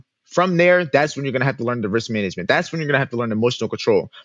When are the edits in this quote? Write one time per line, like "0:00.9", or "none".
none